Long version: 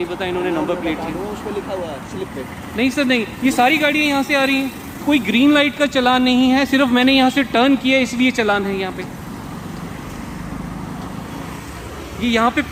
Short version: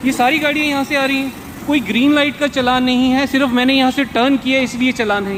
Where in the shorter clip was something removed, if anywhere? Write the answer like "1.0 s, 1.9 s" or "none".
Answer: none